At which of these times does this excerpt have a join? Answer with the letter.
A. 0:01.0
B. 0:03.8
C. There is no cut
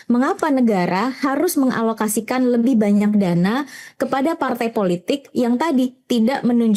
C